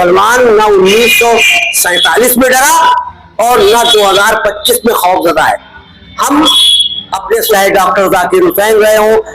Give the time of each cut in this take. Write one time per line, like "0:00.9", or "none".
0:07.5

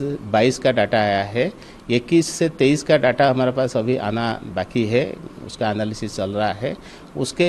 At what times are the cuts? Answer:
none

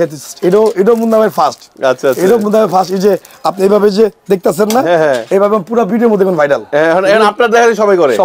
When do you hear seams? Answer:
none

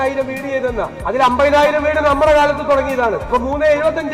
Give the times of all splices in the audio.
0:01.0
0:03.2

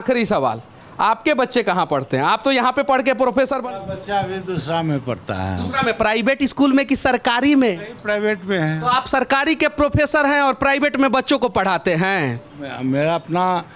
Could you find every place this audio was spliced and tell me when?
0:03.6

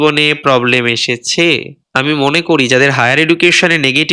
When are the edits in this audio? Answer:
0:01.8

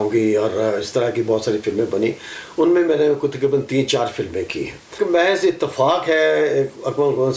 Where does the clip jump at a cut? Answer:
0:04.9

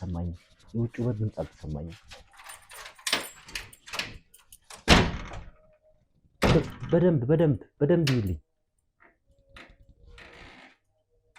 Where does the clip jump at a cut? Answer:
none

